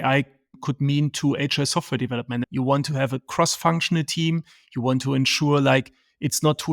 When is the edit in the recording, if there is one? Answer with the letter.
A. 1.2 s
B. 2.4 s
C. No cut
B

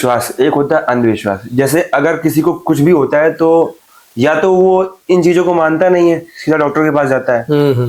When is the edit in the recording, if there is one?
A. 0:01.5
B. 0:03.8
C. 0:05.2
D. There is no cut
D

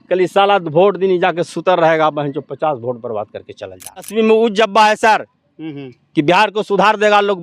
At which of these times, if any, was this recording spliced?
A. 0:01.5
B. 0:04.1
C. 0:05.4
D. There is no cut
B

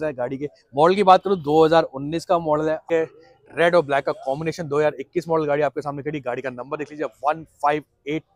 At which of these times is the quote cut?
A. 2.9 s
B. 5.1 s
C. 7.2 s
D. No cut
A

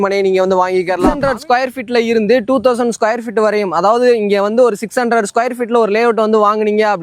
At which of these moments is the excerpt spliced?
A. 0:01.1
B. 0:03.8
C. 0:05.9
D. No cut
A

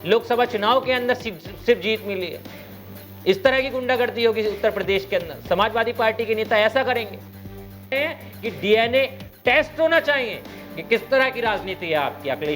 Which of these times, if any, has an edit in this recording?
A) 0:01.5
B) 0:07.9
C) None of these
B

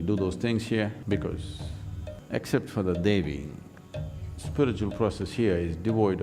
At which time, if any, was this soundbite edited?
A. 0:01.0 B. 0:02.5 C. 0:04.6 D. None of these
A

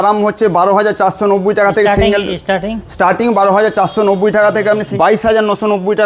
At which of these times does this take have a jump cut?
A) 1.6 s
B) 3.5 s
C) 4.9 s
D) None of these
C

